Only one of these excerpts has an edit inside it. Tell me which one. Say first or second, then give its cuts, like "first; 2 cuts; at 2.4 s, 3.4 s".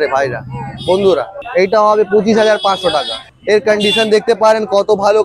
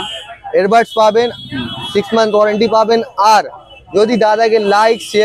first; 2 cuts; at 1.4 s, 3.2 s